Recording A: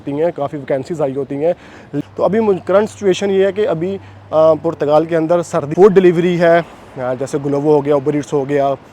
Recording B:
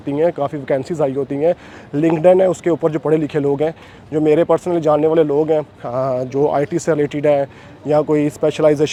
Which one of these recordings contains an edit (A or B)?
A